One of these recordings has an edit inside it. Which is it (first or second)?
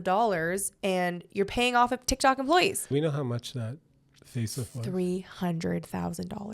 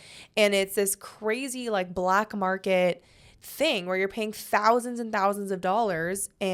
first